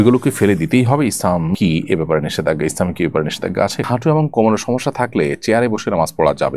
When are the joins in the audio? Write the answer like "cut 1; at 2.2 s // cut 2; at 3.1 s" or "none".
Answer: cut 1; at 3.9 s

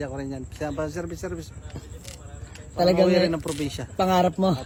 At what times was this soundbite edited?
none

